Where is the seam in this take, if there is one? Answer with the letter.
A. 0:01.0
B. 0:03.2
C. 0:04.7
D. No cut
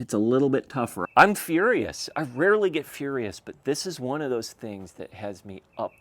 A